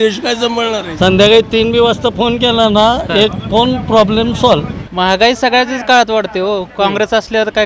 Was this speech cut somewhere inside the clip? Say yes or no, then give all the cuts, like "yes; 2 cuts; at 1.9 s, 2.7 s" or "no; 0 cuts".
yes; 2 cuts; at 0.9 s, 4.8 s